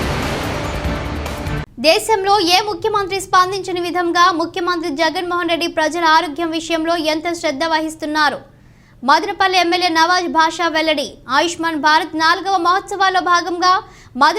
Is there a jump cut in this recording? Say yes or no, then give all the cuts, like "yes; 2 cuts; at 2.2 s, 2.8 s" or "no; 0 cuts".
no; 0 cuts